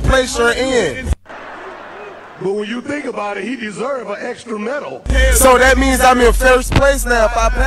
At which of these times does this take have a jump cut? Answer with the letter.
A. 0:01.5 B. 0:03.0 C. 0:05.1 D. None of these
C